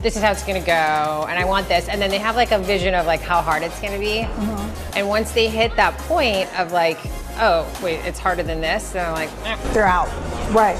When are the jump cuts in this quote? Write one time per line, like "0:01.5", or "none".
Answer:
none